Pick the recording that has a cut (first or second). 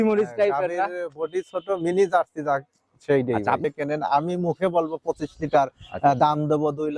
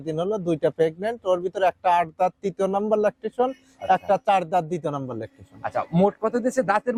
first